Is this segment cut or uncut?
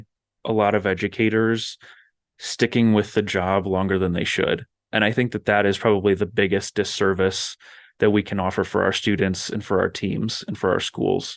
uncut